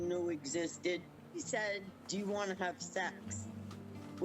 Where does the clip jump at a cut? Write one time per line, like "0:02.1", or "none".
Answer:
0:01.4